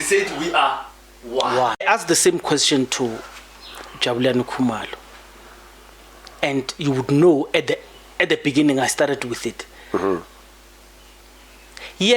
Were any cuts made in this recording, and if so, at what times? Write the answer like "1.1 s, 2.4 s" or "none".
1.8 s